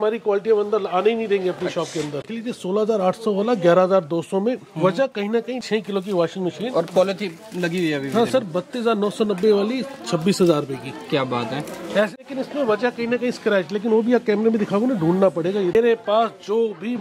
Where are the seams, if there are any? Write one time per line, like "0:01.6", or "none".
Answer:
0:02.2
0:05.6
0:12.2
0:15.8